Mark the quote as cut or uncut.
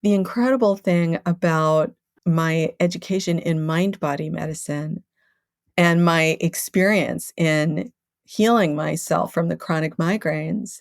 cut